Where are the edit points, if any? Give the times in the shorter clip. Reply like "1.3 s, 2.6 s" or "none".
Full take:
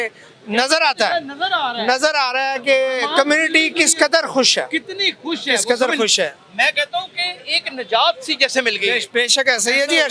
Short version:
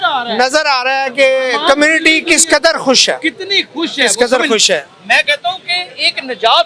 none